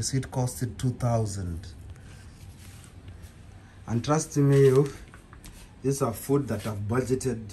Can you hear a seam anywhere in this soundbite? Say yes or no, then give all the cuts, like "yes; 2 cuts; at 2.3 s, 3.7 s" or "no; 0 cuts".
no; 0 cuts